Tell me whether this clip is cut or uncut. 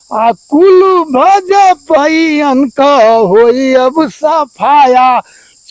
uncut